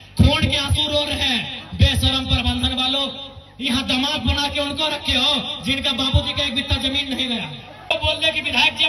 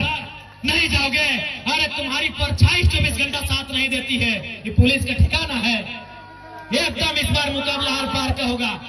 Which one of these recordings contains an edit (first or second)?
first